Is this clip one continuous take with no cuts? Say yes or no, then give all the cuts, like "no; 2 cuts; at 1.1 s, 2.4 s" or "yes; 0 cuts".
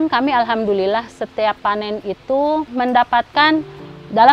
yes; 0 cuts